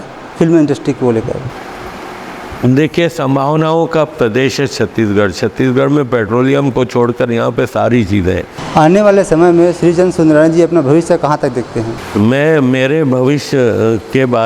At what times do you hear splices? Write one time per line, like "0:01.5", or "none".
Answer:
0:08.6
0:12.0